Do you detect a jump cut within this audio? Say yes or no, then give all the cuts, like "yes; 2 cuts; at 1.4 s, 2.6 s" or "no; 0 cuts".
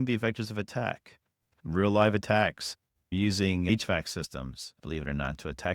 yes; 2 cuts; at 1.5 s, 4.7 s